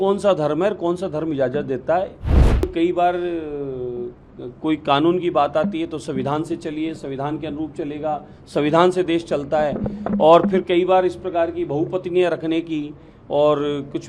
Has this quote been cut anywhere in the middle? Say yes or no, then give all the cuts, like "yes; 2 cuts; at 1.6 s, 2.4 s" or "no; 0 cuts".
yes; 1 cut; at 2.6 s